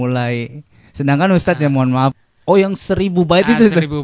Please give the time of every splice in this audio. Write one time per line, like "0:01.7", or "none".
0:02.2